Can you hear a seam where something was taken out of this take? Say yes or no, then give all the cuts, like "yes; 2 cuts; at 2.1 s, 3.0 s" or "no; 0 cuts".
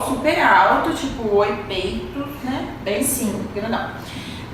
no; 0 cuts